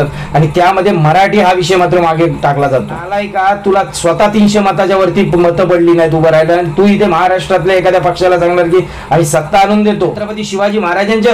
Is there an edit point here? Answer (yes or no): yes